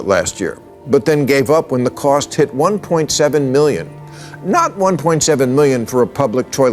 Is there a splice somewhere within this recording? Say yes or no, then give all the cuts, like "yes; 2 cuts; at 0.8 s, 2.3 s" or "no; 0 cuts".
no; 0 cuts